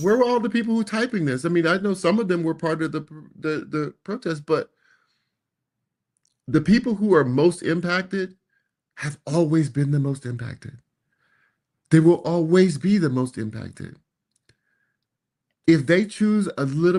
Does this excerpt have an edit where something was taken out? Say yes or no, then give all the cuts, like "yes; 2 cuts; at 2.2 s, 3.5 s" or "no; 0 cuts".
no; 0 cuts